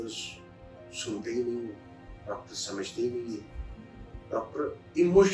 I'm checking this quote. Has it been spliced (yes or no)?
no